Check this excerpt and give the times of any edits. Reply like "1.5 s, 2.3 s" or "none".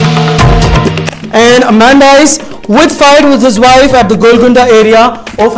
0.9 s

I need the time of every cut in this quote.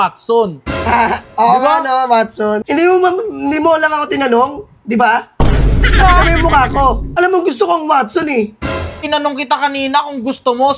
2.6 s, 7.1 s, 9.0 s

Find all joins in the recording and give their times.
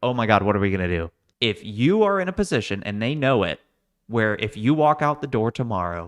1.2 s

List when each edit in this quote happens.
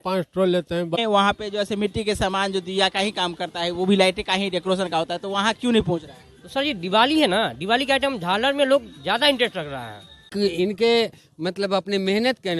1.0 s, 10.3 s

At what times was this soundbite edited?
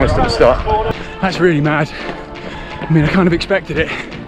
0.9 s

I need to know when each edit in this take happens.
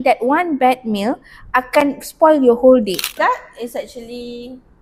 3.1 s

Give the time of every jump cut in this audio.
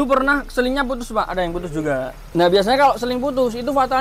2.2 s

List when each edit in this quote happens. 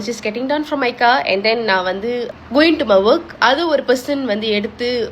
2.4 s

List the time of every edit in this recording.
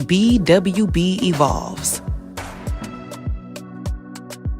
1.7 s

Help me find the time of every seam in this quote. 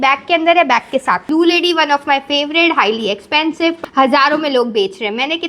1.2 s, 3.8 s

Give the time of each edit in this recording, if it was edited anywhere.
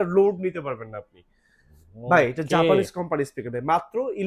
none

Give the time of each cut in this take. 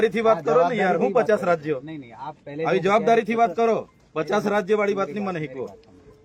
none

